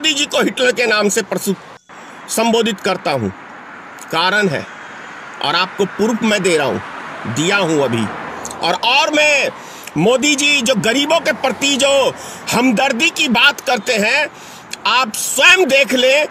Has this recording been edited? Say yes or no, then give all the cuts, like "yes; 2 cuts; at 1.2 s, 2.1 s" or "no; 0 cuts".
no; 0 cuts